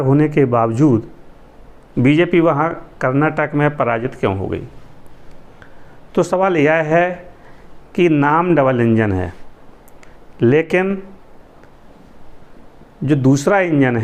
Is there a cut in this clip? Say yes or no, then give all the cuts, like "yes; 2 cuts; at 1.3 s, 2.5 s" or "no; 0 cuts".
no; 0 cuts